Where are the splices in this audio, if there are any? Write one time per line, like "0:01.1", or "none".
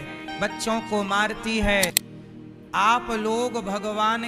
0:02.1